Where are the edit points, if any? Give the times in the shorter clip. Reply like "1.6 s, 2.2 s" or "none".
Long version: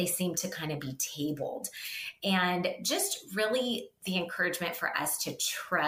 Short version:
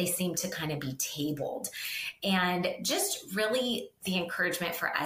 none